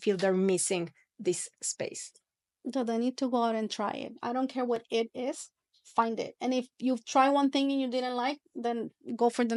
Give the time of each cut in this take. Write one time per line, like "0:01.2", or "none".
none